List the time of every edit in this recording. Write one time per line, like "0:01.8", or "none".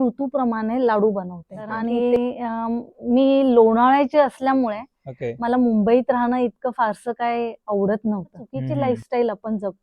0:01.9
0:08.6

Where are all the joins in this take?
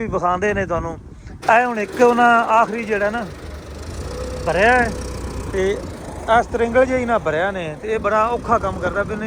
0:01.3

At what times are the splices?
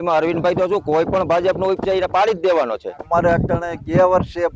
0:03.1

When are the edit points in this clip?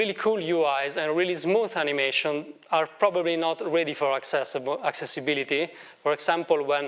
none

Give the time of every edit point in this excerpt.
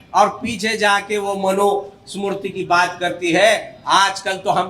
none

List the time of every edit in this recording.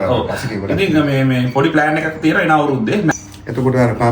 0:03.1

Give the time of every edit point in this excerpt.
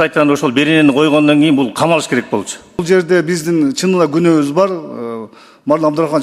0:02.8

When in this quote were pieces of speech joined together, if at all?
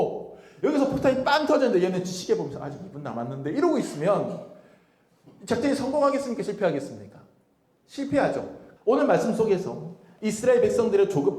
0:08.6

